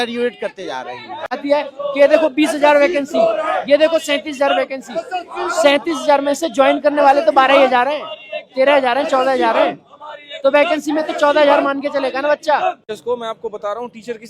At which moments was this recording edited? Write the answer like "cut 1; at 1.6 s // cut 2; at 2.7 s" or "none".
cut 1; at 1.2 s // cut 2; at 12.9 s